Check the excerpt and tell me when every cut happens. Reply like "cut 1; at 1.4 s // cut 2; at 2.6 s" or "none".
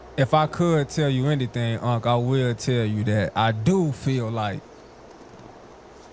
cut 1; at 1.8 s